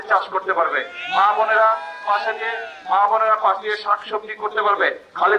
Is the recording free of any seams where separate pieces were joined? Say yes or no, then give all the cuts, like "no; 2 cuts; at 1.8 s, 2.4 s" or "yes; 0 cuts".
yes; 0 cuts